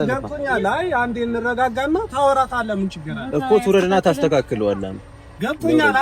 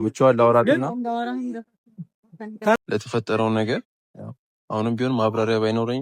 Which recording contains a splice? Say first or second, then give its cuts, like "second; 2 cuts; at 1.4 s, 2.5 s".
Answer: second; 1 cut; at 2.8 s